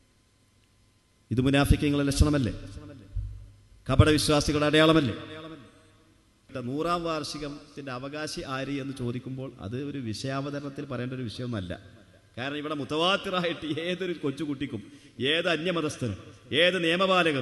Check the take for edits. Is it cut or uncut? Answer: cut